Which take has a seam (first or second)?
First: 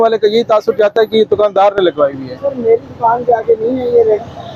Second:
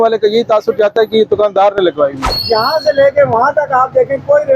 second